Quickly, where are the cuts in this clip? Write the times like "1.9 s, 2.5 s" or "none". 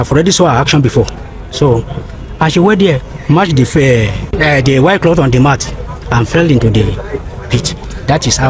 4.3 s

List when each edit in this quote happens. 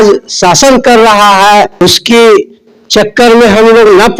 1.8 s

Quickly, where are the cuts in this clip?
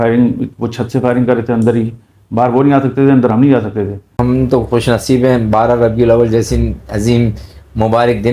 4.2 s

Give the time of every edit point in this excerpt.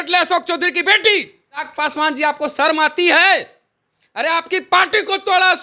1.7 s

